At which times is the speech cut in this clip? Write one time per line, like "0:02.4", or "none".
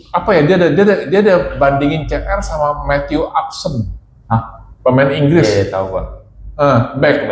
none